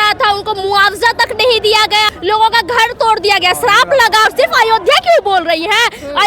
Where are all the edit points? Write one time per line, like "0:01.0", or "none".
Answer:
0:02.1
0:04.3